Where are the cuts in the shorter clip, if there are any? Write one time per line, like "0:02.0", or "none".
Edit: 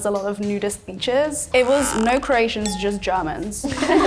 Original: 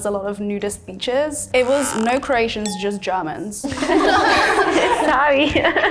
none

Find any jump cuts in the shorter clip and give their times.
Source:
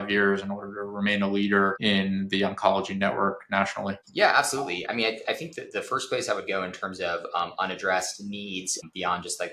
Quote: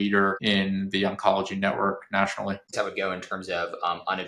0:02.7

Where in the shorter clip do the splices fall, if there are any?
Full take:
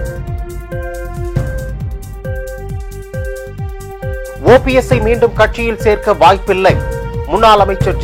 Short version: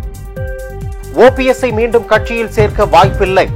0:01.1

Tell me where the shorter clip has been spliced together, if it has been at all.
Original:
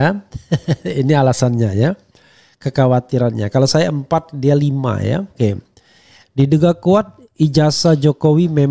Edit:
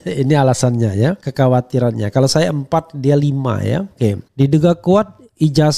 0:01.2
0:04.2

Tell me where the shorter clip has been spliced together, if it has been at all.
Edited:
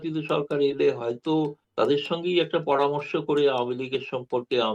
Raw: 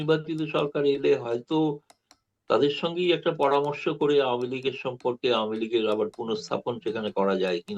0:01.6

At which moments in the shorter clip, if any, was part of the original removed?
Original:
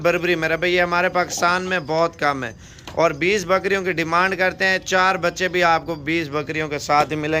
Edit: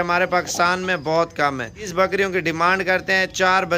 0:01.9

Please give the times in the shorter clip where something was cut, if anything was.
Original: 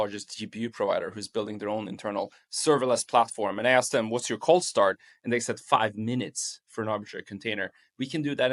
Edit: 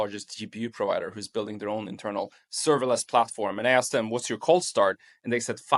none

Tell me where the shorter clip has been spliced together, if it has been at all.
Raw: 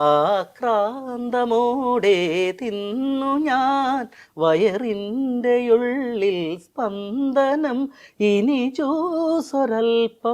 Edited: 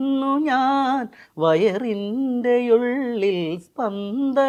none

